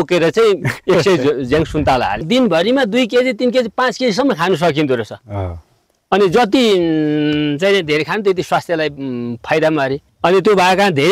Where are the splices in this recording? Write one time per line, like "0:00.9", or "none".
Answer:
0:02.2